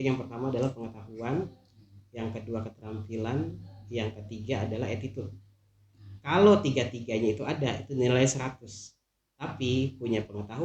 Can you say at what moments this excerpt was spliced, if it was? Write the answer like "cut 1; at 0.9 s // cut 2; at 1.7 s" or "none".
none